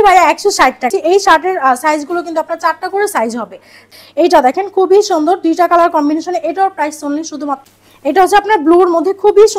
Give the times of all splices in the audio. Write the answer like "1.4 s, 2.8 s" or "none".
0.9 s, 3.7 s, 7.7 s